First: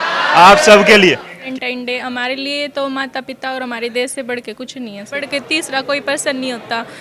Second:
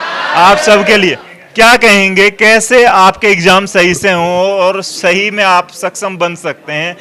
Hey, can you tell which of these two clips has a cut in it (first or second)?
first